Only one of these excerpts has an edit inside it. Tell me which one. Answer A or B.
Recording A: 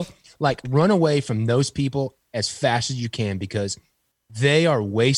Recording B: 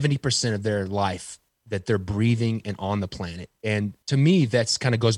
B